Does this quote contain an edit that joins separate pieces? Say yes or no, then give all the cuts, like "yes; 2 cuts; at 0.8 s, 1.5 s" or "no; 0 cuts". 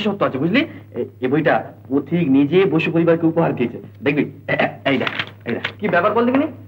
yes; 1 cut; at 5.7 s